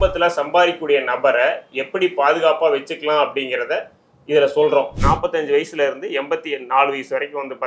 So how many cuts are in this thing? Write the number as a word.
one